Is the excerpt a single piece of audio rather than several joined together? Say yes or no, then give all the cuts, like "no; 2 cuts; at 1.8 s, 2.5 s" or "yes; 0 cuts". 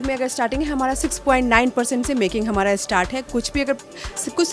yes; 0 cuts